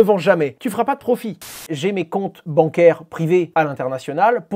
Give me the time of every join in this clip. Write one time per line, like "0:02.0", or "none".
0:01.4